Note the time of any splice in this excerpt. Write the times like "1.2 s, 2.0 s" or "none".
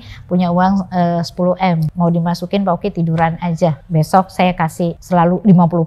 1.9 s, 3.8 s, 5.0 s